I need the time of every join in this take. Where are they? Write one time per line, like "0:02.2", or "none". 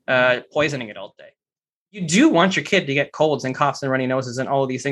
0:02.1